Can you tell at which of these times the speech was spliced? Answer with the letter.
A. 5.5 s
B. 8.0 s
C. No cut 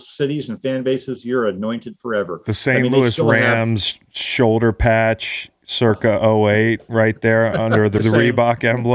B